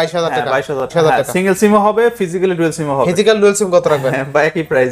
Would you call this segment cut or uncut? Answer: cut